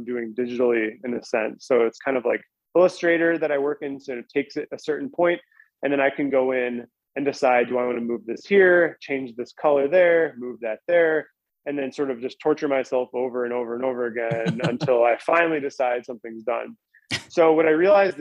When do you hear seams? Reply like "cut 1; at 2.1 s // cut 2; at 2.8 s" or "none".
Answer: none